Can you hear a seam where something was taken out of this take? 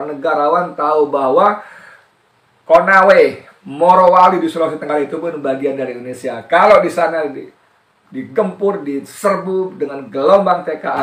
no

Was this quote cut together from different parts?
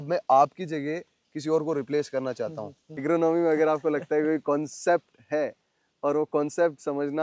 yes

